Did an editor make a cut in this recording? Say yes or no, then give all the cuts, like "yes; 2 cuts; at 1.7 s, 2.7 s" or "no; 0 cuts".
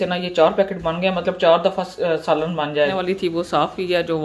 yes; 1 cut; at 3.0 s